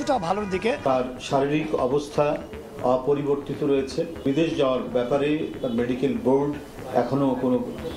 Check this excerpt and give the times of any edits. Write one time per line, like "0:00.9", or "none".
0:00.8
0:04.2